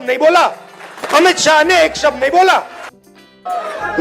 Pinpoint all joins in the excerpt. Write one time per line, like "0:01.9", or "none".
0:03.1

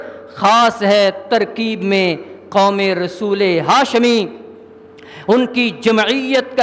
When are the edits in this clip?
none

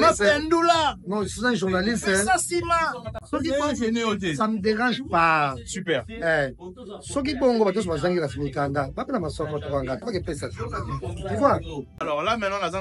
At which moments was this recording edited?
0:03.1
0:11.9

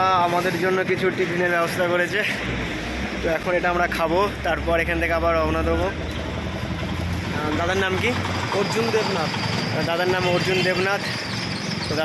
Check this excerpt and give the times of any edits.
none

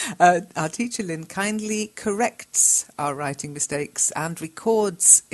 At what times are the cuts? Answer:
0:03.1

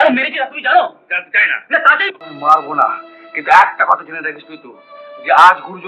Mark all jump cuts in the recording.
0:02.2

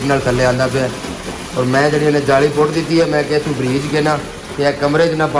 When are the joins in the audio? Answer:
none

